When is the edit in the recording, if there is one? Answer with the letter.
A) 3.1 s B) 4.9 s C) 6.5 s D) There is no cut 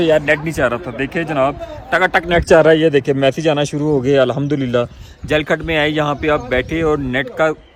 D